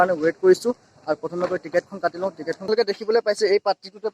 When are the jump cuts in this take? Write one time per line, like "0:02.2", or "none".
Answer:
0:02.6

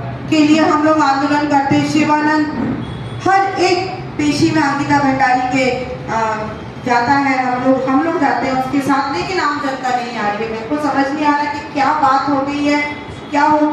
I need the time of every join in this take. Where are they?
none

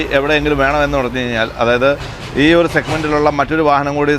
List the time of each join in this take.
none

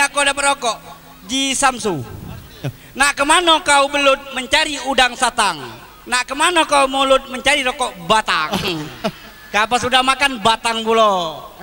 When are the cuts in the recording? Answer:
none

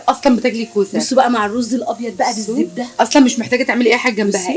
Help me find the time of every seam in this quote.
0:02.9

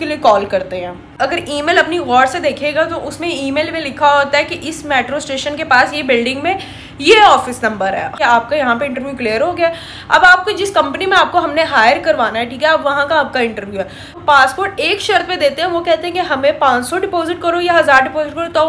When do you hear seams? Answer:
0:01.1
0:08.1
0:14.1

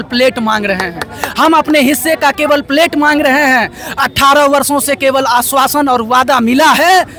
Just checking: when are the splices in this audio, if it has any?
none

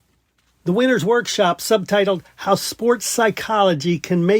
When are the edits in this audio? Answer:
none

